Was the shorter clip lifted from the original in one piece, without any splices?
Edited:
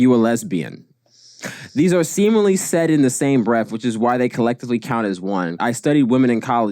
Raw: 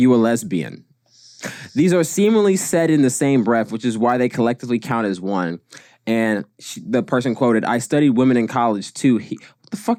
no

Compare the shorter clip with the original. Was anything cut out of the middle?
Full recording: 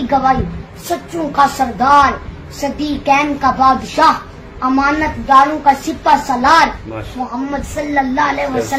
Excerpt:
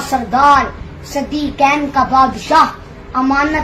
no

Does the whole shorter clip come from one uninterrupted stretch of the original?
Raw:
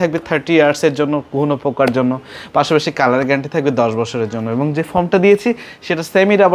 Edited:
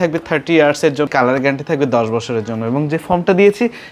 no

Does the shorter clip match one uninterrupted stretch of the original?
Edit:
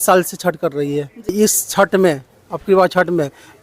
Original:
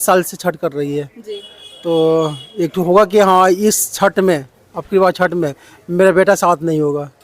no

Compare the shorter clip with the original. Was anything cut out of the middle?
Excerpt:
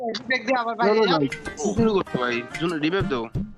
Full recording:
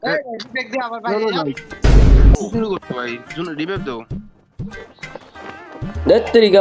yes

